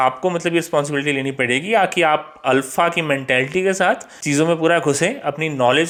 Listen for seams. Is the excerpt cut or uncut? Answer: uncut